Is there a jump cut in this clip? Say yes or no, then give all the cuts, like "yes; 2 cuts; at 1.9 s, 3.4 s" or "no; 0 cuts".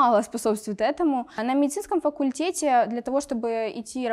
yes; 1 cut; at 1.4 s